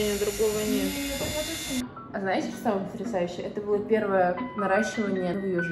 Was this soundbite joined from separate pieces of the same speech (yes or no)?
yes